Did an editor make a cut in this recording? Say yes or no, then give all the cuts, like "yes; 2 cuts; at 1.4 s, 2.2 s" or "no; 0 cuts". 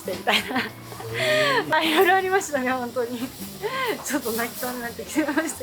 yes; 1 cut; at 1.7 s